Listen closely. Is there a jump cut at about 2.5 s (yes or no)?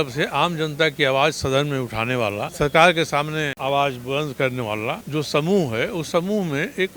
yes